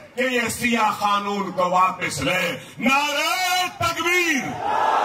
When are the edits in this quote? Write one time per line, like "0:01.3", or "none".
none